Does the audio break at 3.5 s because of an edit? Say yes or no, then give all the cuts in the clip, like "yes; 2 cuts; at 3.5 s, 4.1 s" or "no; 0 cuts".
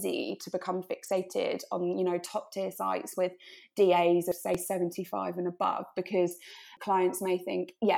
no; 0 cuts